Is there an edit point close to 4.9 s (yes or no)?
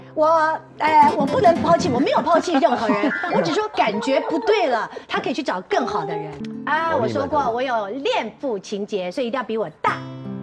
no